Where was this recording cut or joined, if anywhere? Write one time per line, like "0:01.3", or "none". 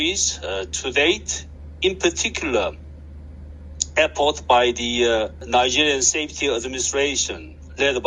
0:05.4